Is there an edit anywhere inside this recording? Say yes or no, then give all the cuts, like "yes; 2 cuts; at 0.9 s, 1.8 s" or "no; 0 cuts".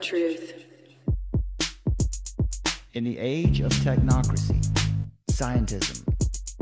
yes; 2 cuts; at 0.9 s, 2.8 s